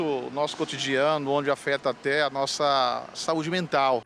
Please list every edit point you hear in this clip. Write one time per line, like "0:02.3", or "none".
none